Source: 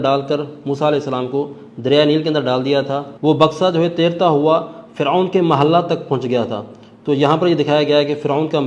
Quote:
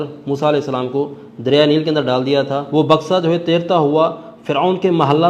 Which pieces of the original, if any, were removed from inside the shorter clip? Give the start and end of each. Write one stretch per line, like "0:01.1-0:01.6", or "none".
0:03.0-0:03.1